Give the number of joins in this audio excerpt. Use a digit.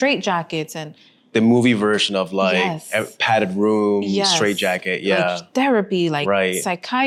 0